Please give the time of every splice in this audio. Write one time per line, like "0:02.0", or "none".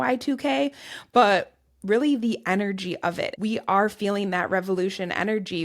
0:03.3

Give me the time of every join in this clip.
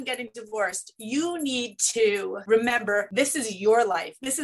0:02.7

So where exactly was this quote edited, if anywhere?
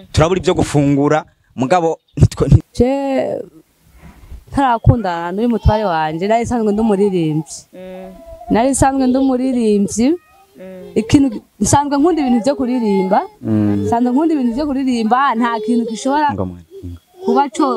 0:02.7

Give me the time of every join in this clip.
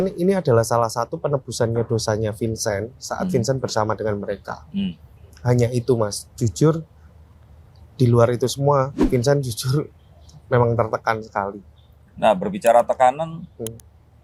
none

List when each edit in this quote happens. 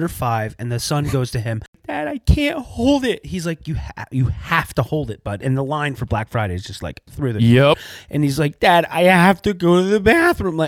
0:01.8
0:07.8

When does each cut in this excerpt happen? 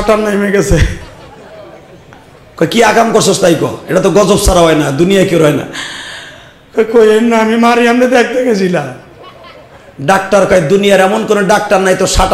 none

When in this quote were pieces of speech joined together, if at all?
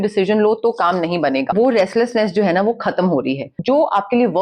0:01.5
0:03.6

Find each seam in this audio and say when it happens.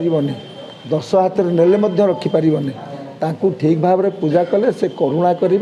none

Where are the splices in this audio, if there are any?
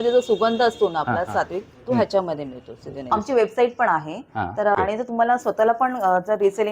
0:03.1
0:04.8

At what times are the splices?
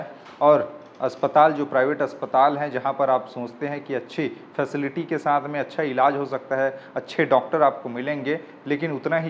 none

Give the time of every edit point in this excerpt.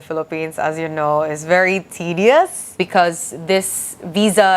0:02.8

